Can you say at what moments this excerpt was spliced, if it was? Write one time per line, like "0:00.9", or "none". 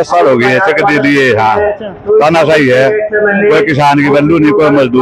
none